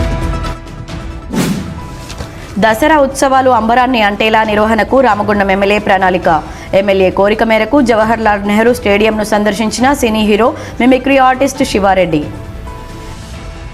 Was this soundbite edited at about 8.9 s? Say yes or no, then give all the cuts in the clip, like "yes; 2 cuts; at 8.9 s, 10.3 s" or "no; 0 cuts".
no; 1 cut; at 1.4 s